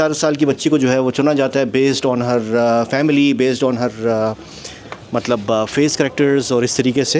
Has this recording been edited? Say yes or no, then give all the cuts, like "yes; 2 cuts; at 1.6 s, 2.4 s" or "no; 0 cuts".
no; 0 cuts